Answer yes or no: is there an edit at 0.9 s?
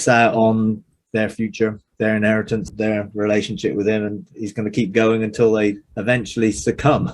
yes